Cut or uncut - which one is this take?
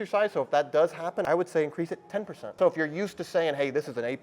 cut